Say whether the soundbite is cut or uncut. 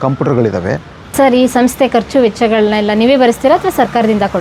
cut